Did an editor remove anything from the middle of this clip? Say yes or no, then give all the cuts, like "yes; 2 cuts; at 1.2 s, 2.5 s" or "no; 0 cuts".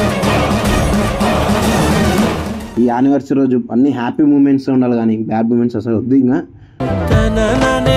yes; 1 cut; at 2.6 s